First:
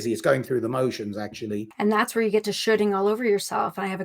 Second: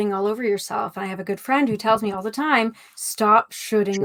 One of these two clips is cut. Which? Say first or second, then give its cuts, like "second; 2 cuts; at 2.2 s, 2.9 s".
first; 1 cut; at 1.7 s